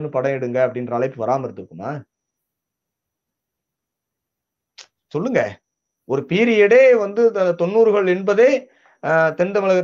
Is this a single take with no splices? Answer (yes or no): yes